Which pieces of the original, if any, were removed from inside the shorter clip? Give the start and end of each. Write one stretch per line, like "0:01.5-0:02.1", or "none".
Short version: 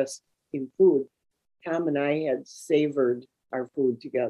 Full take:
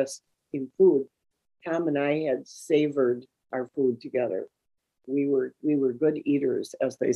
none